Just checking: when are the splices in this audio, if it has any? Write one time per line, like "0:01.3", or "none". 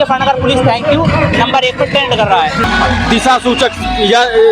0:02.6